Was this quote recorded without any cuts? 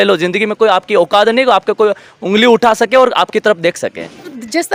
yes; 0 cuts

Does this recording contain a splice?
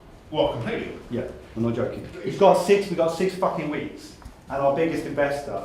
yes; 2 cuts; at 1.0 s, 2.1 s

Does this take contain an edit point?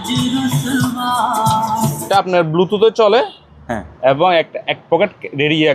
yes; 1 cut; at 2.1 s

